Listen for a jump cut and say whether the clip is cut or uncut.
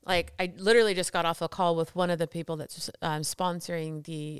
uncut